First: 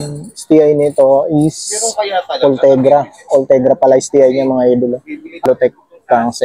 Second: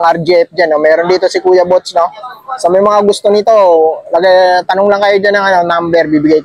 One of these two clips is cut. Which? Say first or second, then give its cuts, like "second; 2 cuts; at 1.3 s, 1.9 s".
first; 1 cut; at 5.4 s